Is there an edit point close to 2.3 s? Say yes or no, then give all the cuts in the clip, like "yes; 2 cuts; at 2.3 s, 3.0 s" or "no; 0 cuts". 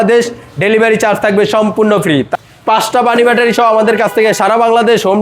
yes; 1 cut; at 2.3 s